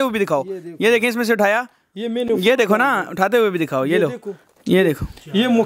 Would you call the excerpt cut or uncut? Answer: uncut